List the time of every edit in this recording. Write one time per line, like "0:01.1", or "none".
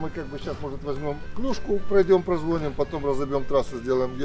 none